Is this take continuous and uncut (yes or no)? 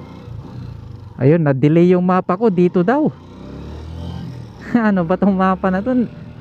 no